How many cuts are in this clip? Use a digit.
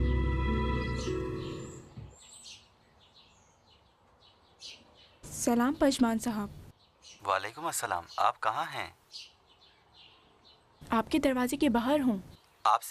1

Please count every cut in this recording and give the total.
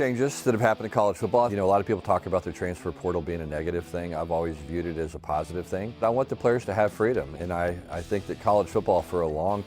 2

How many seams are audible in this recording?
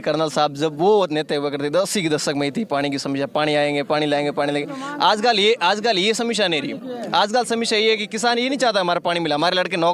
0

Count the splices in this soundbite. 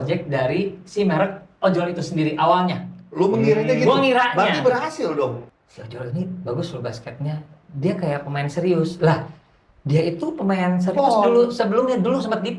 1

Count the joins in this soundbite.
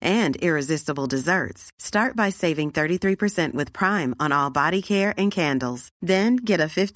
0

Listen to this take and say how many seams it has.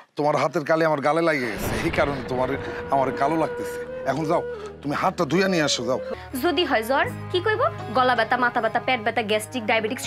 1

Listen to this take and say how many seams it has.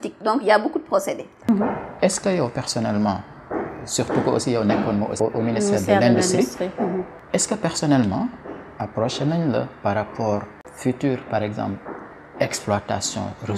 4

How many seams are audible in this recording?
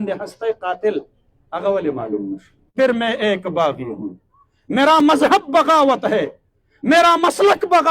1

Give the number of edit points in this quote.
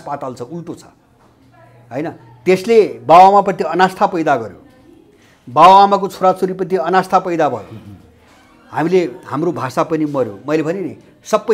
0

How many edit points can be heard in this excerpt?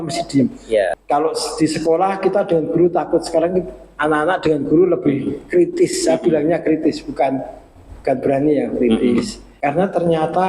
2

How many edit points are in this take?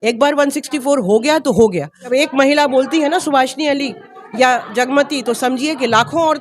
1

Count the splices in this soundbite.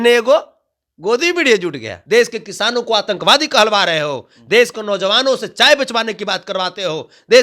1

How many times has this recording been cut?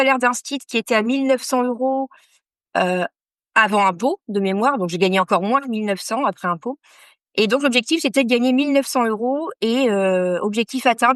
0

